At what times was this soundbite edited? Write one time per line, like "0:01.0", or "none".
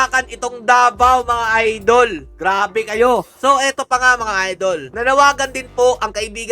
none

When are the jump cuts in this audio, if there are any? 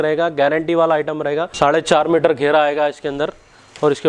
0:01.5

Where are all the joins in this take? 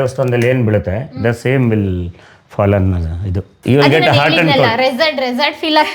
0:03.5

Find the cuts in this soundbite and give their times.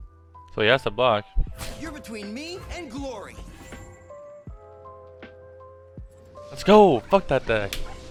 none

